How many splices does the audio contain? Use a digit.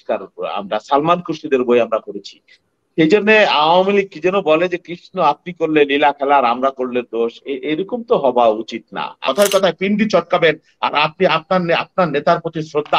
1